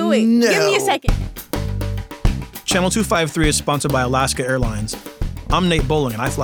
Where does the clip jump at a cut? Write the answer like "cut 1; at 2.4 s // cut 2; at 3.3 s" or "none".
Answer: cut 1; at 1.0 s